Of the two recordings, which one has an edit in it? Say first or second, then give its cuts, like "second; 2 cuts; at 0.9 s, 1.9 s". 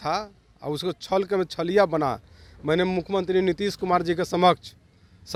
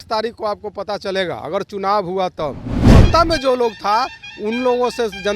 second; 1 cut; at 2.9 s